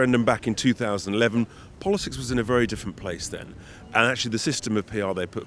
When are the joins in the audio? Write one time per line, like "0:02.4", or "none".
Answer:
none